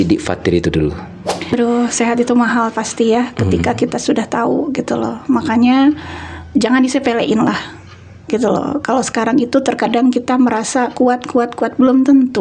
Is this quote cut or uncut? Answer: cut